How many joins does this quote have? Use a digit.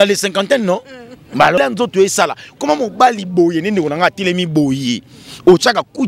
1